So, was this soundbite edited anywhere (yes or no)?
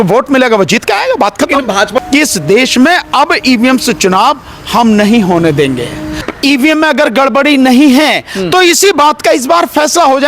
yes